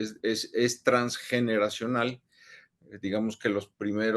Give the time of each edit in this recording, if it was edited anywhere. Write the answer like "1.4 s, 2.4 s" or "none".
none